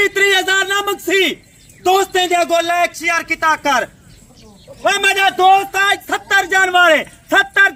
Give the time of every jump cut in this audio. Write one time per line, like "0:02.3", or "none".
none

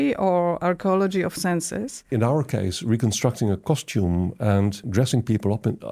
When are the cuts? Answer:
0:02.0
0:04.8

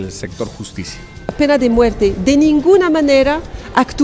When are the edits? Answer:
0:01.3

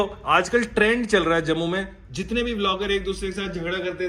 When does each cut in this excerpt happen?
none

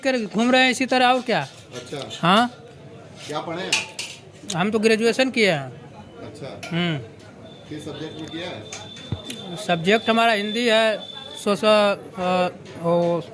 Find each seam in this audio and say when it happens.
none

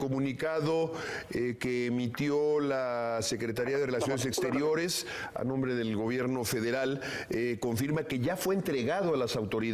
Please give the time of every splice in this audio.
0:08.4

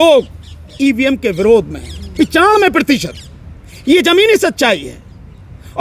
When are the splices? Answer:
none

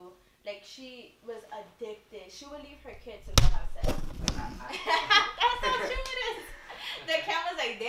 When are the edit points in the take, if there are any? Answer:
none

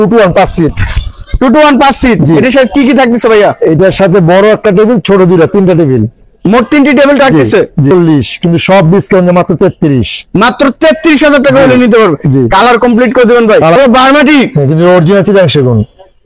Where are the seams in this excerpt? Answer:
0:07.9
0:13.8

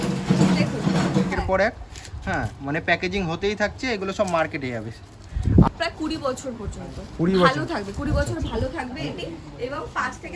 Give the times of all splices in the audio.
0:01.3
0:05.7

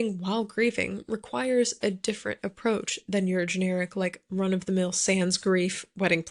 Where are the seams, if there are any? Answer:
none

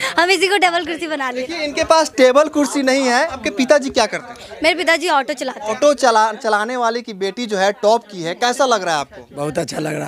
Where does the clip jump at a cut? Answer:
0:01.4
0:03.4
0:05.6

